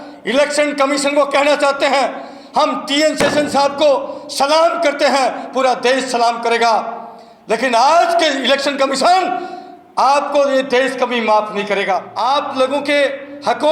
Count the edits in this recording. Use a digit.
1